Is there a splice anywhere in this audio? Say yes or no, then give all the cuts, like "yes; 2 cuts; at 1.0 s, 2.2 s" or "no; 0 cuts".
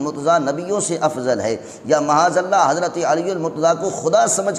no; 0 cuts